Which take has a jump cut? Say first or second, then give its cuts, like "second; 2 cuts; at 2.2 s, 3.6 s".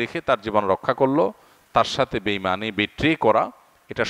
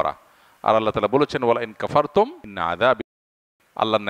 second; 2 cuts; at 2.5 s, 3.2 s